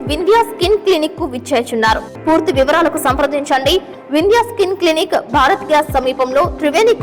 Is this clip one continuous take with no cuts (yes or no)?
no